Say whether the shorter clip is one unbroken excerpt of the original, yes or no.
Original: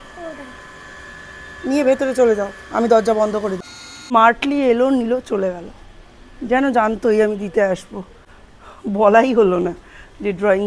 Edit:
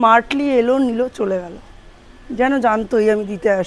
yes